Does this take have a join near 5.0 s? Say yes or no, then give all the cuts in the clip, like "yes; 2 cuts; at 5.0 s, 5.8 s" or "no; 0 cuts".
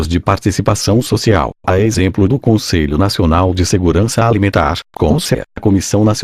yes; 3 cuts; at 2.4 s, 3.6 s, 5.0 s